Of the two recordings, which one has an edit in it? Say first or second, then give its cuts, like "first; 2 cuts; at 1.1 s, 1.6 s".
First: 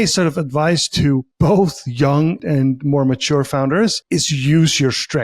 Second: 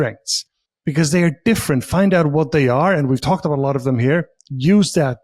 first; 3 cuts; at 1.3 s, 2.4 s, 4.0 s